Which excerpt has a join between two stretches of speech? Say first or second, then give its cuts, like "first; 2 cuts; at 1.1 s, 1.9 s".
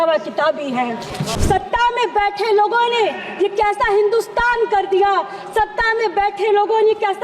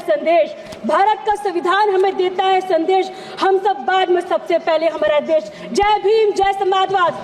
first; 1 cut; at 1.3 s